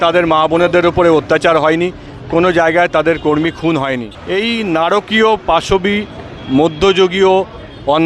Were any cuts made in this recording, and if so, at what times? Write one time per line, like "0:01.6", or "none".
0:04.1

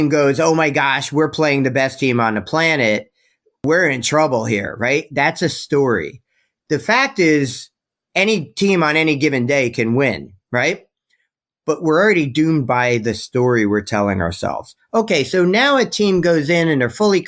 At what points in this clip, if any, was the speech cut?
0:03.6

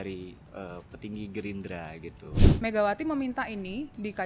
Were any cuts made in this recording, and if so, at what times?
0:02.5

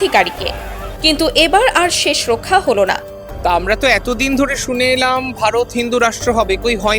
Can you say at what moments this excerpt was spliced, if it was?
0:03.5

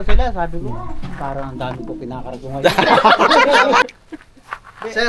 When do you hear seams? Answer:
0:03.9

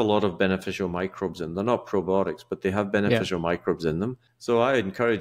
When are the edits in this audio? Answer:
0:04.3

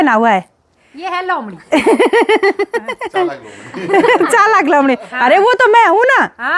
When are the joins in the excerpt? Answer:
none

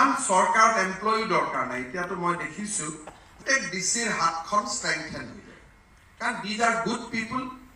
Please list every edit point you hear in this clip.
0:03.4

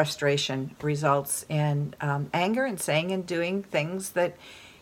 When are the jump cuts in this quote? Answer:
none

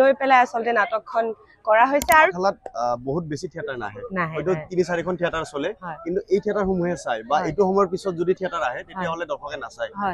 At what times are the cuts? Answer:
0:02.3

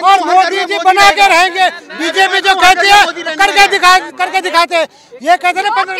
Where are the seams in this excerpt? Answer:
none

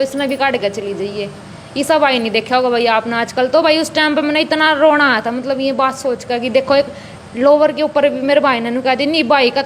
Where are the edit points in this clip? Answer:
none

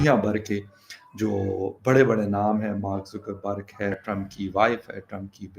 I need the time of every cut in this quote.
0:03.9

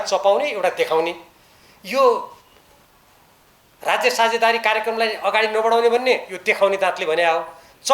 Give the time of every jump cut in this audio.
none

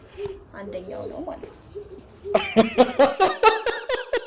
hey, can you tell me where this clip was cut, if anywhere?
0:01.4

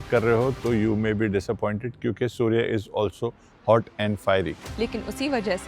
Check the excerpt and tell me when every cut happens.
0:04.6

